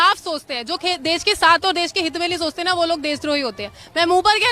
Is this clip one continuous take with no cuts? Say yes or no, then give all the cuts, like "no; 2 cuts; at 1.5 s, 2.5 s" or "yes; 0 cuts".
yes; 0 cuts